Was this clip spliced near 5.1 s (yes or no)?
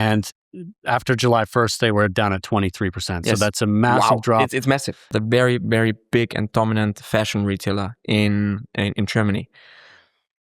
yes